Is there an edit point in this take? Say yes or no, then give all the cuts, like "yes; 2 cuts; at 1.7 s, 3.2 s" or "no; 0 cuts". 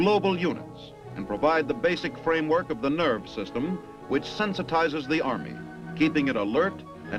no; 0 cuts